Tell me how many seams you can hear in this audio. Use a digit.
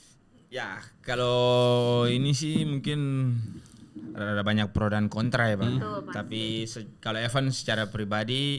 0